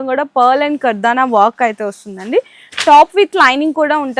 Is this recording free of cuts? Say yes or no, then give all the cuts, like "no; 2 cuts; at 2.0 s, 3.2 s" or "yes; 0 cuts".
yes; 0 cuts